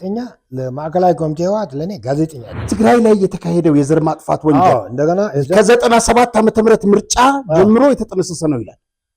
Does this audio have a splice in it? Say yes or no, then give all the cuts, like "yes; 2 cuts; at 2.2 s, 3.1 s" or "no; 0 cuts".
yes; 1 cut; at 2.7 s